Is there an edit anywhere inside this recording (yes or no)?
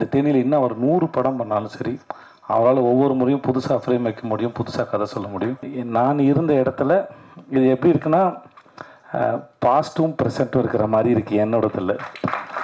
yes